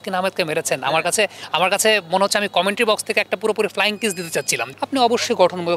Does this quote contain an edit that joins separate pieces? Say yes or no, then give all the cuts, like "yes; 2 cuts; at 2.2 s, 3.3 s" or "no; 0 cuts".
yes; 1 cut; at 4.6 s